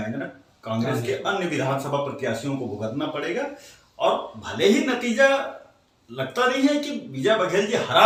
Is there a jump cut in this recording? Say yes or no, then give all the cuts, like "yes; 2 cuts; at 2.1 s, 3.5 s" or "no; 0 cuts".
no; 0 cuts